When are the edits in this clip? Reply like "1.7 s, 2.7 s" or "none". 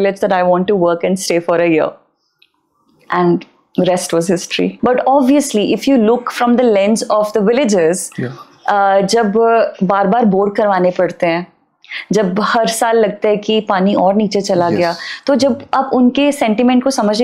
4.7 s